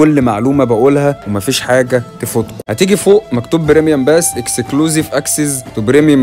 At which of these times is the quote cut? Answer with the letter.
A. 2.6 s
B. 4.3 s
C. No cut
A